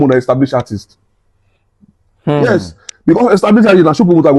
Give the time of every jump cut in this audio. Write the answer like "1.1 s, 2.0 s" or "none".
none